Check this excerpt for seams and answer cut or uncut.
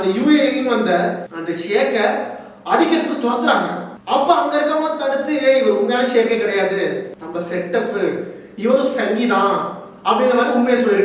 uncut